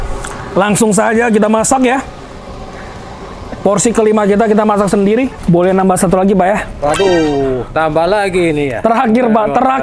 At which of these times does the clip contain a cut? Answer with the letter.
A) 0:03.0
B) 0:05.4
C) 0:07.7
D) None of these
B